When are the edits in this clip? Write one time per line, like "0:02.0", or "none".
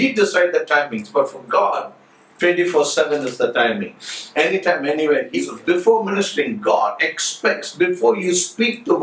0:05.4